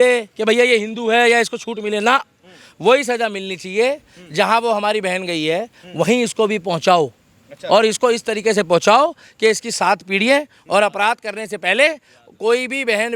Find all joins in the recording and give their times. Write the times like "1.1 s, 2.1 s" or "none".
none